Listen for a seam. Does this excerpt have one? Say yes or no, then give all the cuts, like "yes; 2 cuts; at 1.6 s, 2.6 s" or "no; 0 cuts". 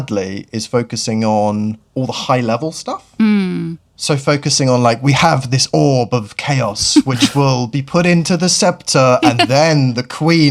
no; 0 cuts